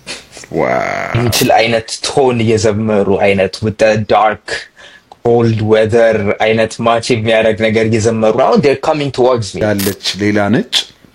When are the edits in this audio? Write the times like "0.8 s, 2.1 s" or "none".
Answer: 1.3 s, 9.6 s